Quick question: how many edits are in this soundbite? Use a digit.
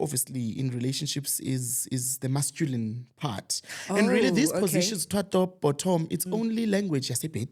0